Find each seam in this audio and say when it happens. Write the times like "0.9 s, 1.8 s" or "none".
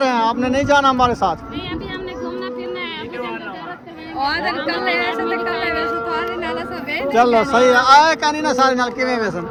none